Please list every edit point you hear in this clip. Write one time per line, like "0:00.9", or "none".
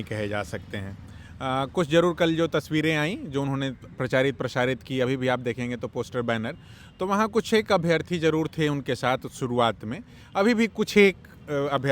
none